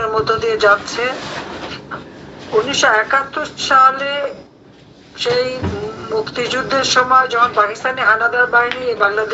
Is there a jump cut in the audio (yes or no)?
no